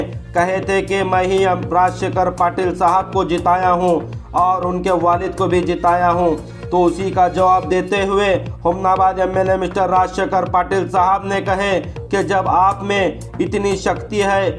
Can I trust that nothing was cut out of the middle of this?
yes; 0 cuts

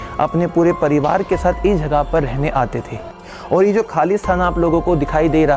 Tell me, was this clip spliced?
yes; 1 cut; at 3.3 s

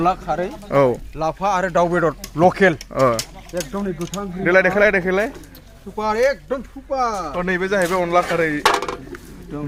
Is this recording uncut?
yes; 0 cuts

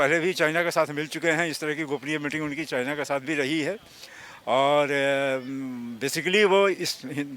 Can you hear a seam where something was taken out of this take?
no; 0 cuts

